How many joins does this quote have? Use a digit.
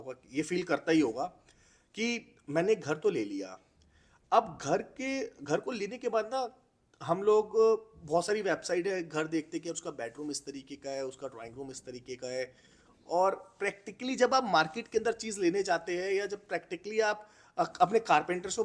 0